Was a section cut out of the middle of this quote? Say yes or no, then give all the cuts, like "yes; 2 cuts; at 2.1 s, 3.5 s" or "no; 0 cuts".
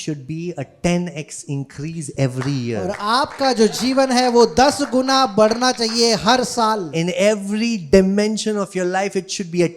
no; 0 cuts